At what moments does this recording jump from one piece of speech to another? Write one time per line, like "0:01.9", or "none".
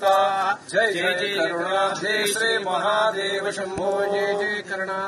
none